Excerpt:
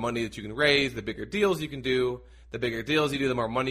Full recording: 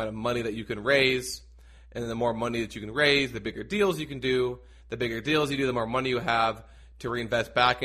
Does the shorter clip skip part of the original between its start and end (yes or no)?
no